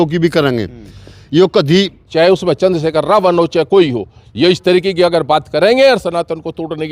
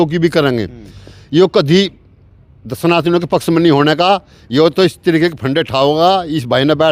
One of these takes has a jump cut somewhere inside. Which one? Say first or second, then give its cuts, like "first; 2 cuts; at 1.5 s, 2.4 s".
first; 1 cut; at 2.0 s